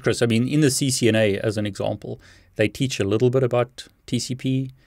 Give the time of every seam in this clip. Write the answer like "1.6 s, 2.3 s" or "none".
none